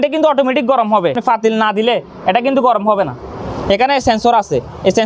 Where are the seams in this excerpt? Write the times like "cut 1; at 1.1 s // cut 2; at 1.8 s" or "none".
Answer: cut 1; at 1.2 s